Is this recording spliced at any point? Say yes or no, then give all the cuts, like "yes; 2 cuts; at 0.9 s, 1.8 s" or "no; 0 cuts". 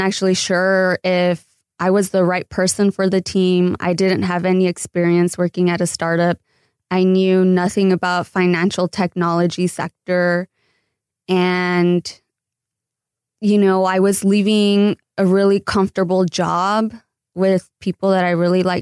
no; 0 cuts